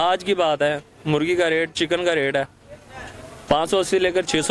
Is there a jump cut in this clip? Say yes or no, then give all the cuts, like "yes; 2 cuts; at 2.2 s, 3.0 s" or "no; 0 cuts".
no; 0 cuts